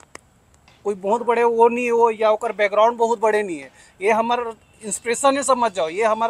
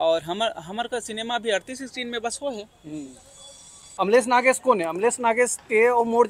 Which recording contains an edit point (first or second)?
second